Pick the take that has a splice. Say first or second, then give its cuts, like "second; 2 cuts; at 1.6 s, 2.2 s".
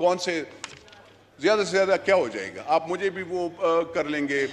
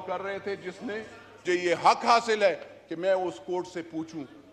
second; 1 cut; at 1.4 s